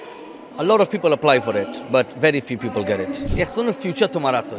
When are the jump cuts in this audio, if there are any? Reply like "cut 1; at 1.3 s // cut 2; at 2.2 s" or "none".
cut 1; at 3.3 s